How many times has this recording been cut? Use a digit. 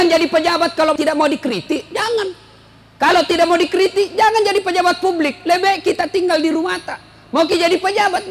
1